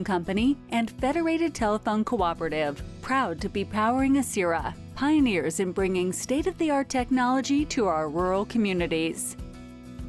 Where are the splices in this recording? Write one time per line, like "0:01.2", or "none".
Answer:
0:09.2